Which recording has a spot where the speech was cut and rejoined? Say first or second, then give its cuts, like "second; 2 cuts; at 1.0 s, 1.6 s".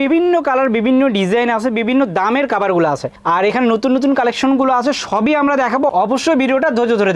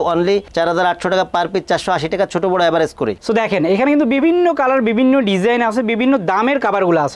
second; 1 cut; at 3.2 s